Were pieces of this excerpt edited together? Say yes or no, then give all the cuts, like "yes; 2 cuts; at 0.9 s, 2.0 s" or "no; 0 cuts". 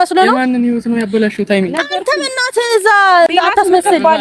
no; 0 cuts